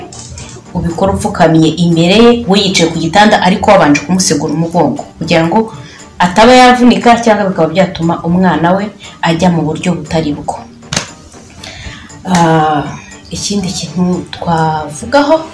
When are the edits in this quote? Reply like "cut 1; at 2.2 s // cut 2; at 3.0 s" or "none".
none